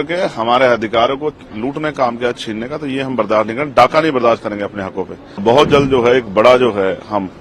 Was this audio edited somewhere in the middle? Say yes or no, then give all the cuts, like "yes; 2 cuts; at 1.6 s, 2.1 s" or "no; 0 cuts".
yes; 1 cut; at 5.4 s